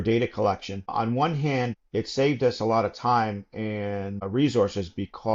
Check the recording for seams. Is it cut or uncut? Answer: cut